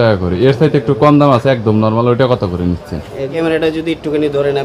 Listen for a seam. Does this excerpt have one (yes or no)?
yes